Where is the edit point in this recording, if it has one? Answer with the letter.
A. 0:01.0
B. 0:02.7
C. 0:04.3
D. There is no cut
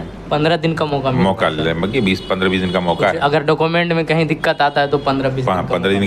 D